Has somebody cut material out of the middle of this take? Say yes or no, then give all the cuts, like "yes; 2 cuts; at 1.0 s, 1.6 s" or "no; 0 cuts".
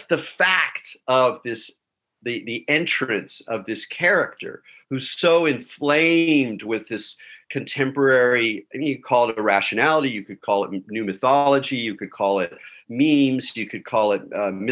no; 0 cuts